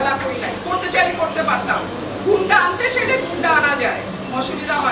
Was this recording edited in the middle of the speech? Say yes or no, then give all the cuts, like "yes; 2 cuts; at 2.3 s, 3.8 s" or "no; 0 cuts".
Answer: no; 0 cuts